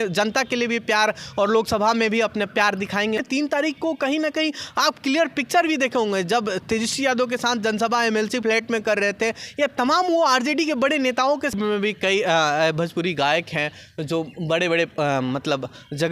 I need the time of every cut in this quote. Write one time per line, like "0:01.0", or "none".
0:03.2
0:11.5